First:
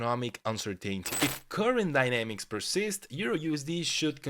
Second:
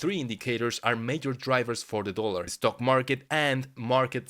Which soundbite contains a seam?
first; 1 cut; at 1.1 s

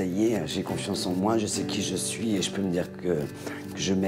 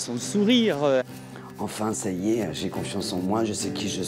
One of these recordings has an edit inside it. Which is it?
second; 1 cut; at 1.0 s

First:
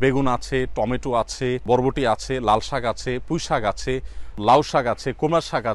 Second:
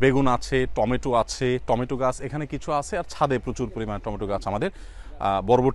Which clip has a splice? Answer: first; 2 cuts; at 1.6 s, 4.4 s

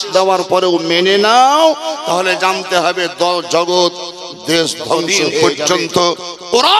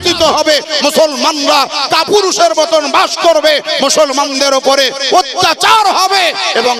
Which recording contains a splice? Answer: first; 1 cut; at 5.6 s

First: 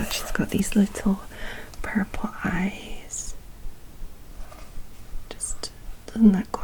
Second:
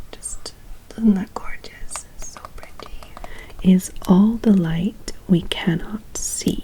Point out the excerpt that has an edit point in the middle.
second; 1 cut; at 3.4 s

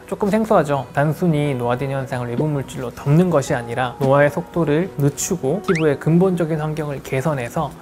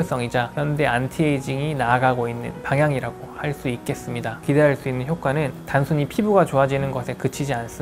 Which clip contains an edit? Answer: second; 1 cut; at 4.4 s

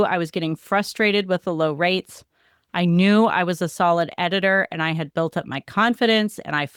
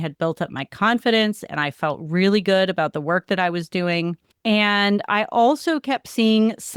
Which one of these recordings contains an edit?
second; 1 cut; at 4.3 s

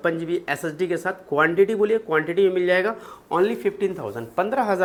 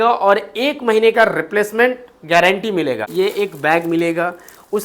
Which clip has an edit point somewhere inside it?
second; 1 cut; at 3.1 s

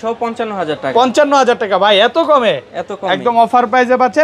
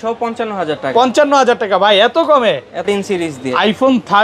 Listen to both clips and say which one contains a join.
second; 1 cut; at 2.8 s

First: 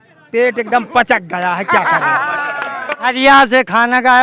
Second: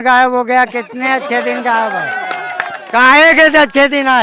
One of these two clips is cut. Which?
first; 1 cut; at 3.0 s

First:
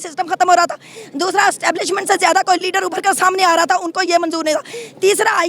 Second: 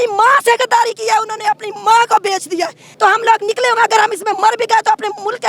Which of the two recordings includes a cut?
second; 1 cut; at 2.9 s

